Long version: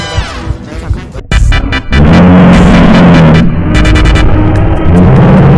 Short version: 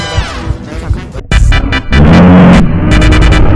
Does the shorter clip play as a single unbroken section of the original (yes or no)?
no